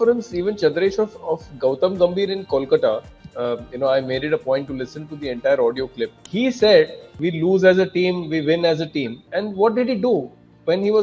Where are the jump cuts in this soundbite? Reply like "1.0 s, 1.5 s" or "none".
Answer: 6.2 s, 7.1 s, 9.2 s

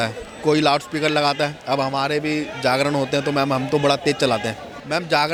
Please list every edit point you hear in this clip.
none

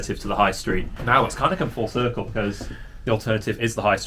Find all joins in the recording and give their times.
0.9 s

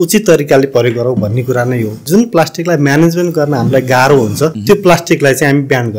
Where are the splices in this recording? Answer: 2.1 s, 4.6 s

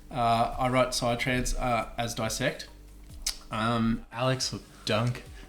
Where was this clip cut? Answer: 4.2 s

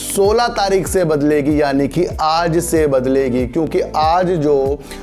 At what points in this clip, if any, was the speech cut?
none

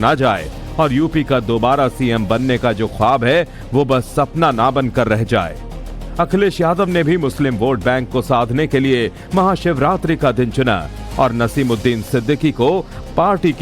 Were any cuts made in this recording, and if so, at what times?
11.0 s

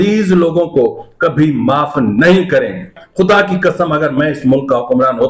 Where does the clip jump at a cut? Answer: 3.0 s

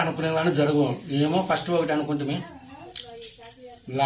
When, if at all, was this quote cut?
none

